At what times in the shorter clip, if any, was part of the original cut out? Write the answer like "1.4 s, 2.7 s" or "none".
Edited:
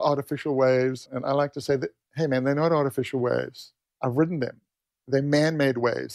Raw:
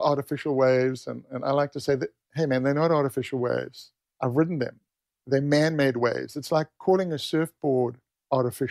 1.1 s